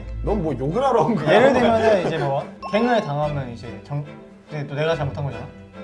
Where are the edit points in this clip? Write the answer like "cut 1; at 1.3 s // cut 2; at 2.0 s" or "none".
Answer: cut 1; at 2.6 s